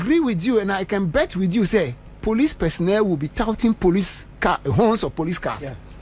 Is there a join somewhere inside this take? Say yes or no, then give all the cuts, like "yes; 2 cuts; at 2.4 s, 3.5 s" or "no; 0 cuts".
no; 0 cuts